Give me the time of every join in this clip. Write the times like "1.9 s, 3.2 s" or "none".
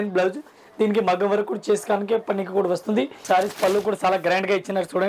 3.2 s